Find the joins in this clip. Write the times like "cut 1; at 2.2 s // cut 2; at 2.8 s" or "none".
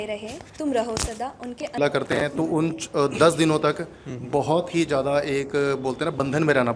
cut 1; at 1.8 s